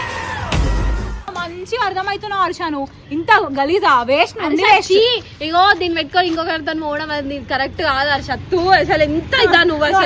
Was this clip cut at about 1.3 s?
yes; 1 cut; at 1.3 s

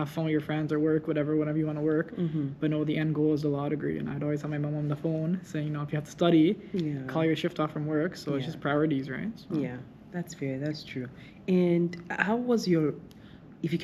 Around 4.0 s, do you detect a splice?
no; 0 cuts

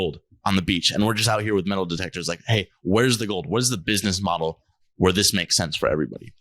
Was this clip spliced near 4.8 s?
no; 0 cuts

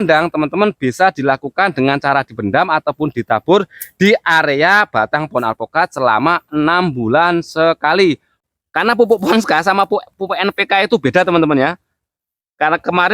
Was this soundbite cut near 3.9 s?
no; 1 cut; at 8.3 s

